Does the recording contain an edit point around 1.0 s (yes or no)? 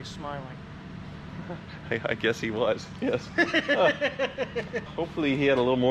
no